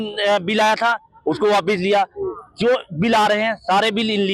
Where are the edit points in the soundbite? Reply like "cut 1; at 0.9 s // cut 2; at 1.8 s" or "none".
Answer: none